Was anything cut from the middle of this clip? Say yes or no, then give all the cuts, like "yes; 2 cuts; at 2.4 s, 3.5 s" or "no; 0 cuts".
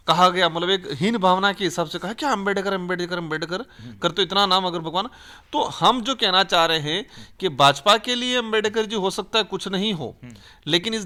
no; 0 cuts